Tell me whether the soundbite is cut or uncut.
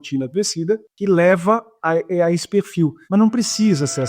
cut